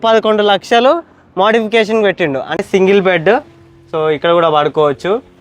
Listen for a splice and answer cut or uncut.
cut